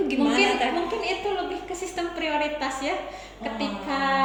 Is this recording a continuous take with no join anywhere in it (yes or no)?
yes